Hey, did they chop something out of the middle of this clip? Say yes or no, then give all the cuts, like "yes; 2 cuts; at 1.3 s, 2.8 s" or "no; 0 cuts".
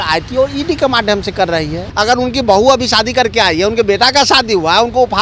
yes; 1 cut; at 1.8 s